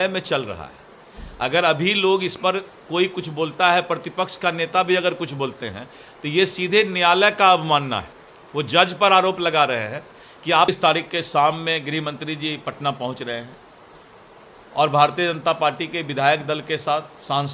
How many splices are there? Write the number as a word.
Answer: one